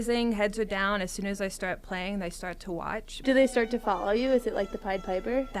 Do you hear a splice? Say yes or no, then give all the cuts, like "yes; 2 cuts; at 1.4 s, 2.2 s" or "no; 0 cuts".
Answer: yes; 1 cut; at 3.1 s